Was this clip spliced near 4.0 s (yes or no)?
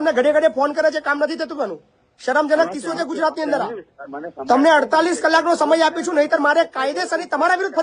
yes